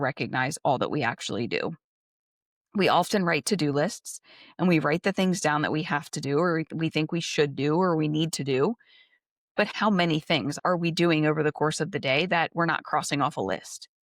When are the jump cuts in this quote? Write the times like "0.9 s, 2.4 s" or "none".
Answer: 9.7 s, 10.6 s